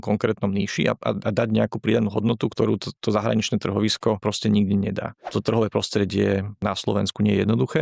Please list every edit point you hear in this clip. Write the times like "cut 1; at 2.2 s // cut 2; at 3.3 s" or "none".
cut 1; at 2.5 s // cut 2; at 4.2 s // cut 3; at 5.3 s // cut 4; at 6.6 s